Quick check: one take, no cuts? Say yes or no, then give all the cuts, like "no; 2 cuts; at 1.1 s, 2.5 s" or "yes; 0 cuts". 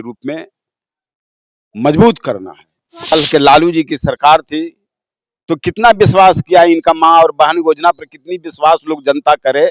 no; 1 cut; at 3.1 s